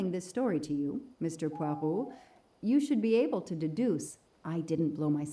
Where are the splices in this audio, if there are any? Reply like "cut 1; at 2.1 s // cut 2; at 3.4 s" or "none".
none